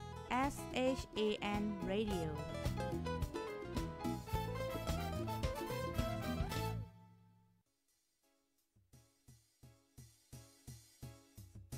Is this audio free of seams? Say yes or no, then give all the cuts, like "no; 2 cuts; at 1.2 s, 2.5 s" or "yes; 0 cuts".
yes; 0 cuts